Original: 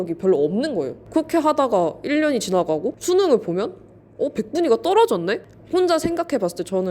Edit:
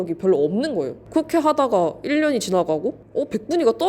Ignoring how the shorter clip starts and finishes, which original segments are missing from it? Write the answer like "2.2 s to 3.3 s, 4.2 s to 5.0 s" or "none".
2.9 s to 4.0 s